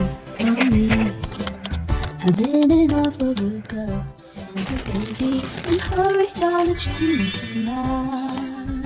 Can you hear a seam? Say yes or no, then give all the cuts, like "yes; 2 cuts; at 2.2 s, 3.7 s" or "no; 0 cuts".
no; 0 cuts